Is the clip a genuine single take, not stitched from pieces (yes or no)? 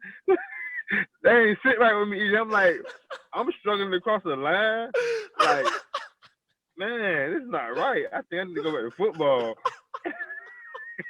yes